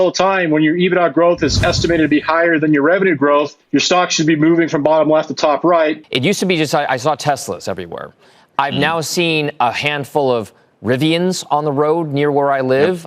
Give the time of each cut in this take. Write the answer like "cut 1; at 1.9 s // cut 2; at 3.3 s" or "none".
cut 1; at 6.0 s